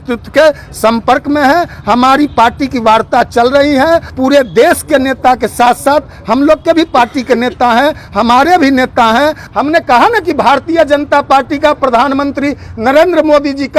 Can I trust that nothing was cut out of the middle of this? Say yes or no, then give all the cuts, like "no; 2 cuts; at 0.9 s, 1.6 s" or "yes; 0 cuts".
no; 2 cuts; at 4.1 s, 9.4 s